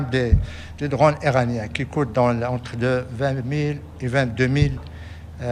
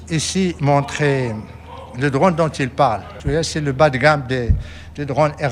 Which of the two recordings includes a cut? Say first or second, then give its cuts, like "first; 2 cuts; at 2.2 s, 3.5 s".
second; 1 cut; at 3.1 s